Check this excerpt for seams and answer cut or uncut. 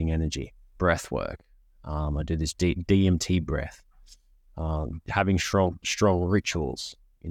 uncut